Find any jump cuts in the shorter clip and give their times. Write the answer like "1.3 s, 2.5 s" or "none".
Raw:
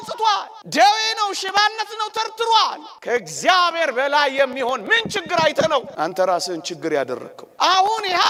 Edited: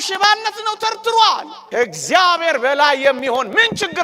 none